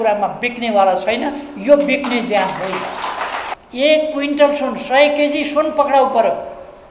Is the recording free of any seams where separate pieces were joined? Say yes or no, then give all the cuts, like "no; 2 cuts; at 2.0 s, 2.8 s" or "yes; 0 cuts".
no; 1 cut; at 3.5 s